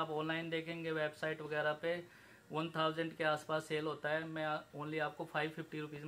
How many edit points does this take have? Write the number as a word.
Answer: zero